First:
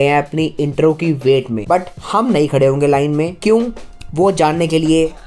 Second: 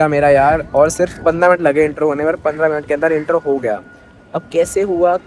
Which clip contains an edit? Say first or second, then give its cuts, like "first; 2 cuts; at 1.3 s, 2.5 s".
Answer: first; 2 cuts; at 1.6 s, 3.3 s